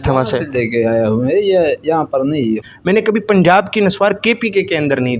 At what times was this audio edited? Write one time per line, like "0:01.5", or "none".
0:02.7